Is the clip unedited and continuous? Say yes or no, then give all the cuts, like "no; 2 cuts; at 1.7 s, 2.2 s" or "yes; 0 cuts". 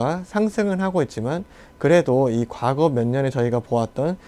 yes; 0 cuts